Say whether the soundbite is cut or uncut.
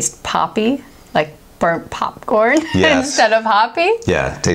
uncut